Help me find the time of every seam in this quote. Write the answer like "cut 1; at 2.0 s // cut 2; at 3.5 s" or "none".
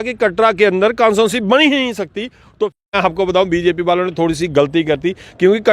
cut 1; at 2.8 s